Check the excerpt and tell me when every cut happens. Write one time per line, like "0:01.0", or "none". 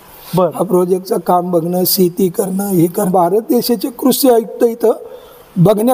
0:03.1